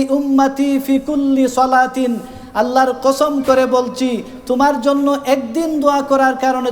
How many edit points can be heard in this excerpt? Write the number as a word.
zero